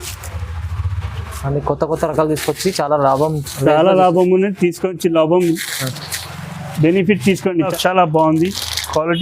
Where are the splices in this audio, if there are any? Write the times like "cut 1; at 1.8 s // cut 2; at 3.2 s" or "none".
cut 1; at 7.7 s